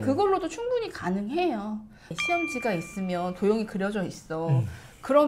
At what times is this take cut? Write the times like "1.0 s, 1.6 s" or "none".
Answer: 2.1 s

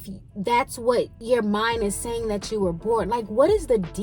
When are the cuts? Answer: 1.2 s

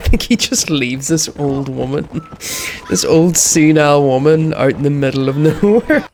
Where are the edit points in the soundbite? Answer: none

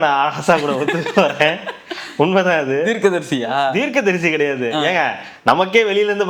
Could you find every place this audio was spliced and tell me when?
none

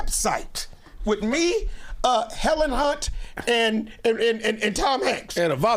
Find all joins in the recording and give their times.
none

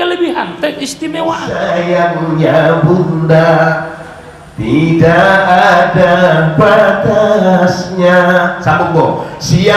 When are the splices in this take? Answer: 1.5 s

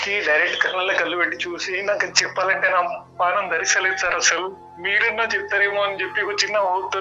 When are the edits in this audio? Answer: none

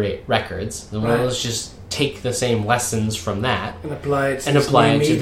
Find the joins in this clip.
none

